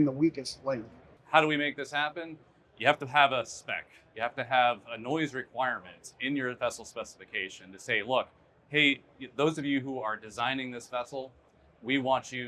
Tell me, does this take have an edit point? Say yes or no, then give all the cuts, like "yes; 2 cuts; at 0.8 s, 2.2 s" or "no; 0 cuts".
yes; 1 cut; at 1.1 s